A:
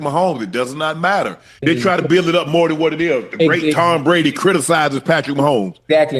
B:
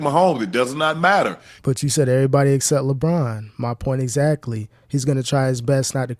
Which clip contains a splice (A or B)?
A